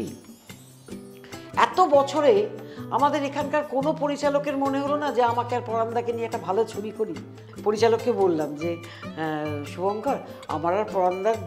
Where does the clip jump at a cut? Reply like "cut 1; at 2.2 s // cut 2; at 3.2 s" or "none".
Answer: cut 1; at 7.4 s